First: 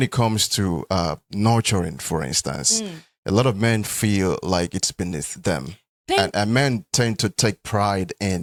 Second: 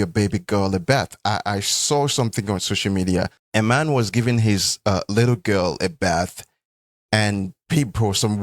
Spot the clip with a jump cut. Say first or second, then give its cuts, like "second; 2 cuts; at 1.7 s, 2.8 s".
second; 1 cut; at 3.4 s